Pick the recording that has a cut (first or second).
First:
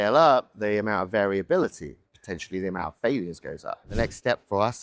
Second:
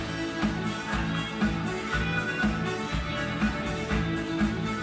first